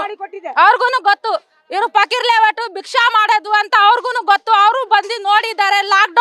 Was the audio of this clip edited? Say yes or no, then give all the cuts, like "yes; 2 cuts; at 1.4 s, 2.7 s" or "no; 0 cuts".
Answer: no; 0 cuts